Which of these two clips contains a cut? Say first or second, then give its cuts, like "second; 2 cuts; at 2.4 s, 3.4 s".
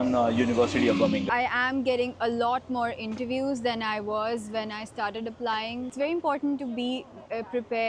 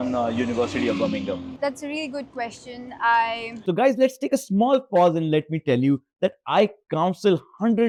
first; 2 cuts; at 1.2 s, 5.9 s